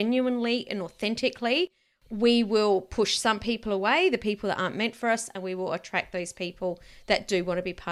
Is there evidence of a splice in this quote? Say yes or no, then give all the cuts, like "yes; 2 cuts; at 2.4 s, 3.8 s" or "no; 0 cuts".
no; 0 cuts